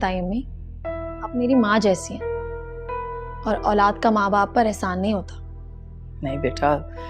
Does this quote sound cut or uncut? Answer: cut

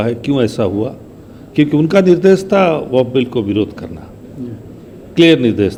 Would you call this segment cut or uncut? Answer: uncut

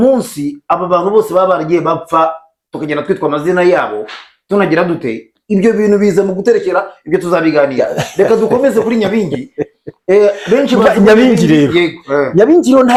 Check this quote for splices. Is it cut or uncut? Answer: uncut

